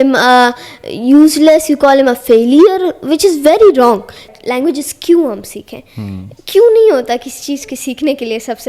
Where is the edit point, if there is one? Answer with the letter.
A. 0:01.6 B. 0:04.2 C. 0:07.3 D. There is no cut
B